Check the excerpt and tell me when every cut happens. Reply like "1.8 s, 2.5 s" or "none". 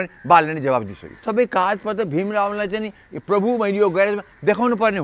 1.2 s